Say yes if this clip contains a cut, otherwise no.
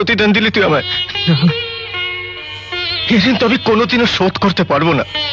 no